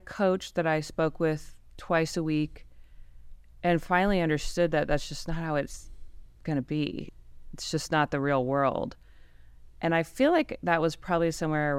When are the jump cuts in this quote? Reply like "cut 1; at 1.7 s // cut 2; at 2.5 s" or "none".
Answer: cut 1; at 7.1 s

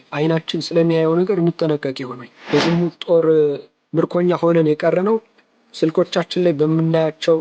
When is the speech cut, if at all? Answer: cut 1; at 2.3 s

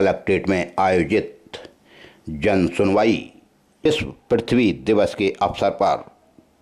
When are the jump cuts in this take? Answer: cut 1; at 3.8 s

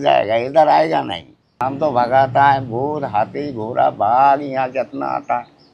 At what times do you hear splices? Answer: cut 1; at 1.5 s

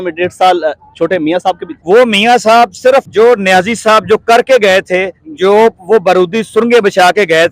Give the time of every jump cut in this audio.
cut 1; at 1.7 s // cut 2; at 3.1 s

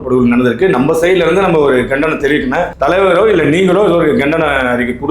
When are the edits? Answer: cut 1; at 2.7 s

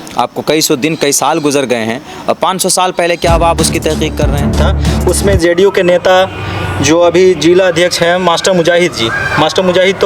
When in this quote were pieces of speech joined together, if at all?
cut 1; at 4.6 s

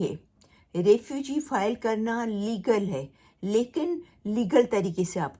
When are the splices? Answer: none

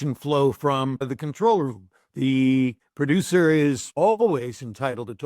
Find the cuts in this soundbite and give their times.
cut 1; at 1.2 s // cut 2; at 2.9 s // cut 3; at 3.9 s

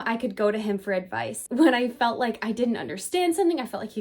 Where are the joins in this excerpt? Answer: cut 1; at 1.4 s

